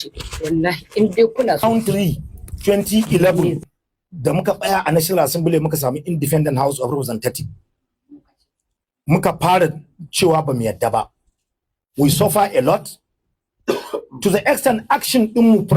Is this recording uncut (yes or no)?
no